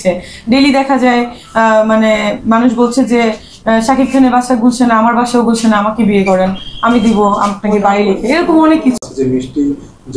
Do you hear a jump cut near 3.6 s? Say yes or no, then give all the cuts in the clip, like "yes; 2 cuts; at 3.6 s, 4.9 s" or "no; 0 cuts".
no; 1 cut; at 9.0 s